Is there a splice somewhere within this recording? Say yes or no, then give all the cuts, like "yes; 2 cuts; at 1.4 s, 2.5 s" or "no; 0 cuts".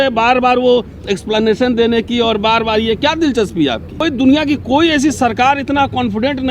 yes; 1 cut; at 4.0 s